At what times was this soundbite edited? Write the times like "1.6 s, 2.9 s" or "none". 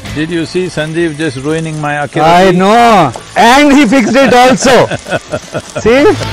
3.2 s